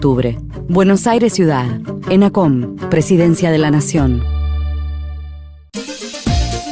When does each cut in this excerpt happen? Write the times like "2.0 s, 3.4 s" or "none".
5.7 s